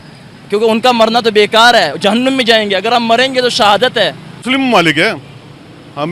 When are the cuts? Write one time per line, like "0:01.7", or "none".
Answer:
0:04.3